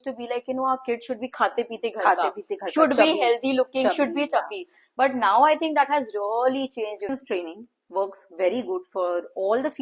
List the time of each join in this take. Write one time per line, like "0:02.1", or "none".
0:07.1